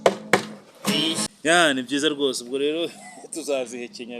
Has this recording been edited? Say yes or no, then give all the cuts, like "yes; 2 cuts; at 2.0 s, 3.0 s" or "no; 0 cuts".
yes; 1 cut; at 1.2 s